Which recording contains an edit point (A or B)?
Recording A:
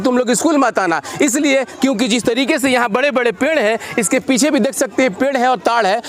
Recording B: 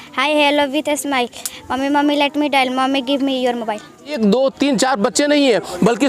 B